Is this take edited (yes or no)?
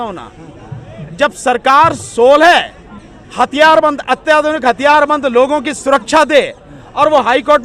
no